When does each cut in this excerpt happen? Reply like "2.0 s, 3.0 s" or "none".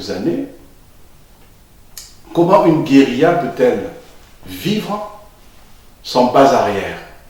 none